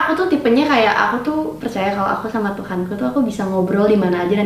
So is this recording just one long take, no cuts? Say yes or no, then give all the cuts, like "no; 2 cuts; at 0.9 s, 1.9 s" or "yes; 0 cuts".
yes; 0 cuts